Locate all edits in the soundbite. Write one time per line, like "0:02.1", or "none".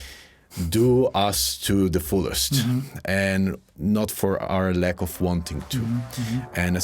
none